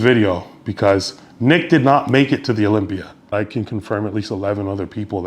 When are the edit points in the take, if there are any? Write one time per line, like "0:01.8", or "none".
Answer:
0:03.3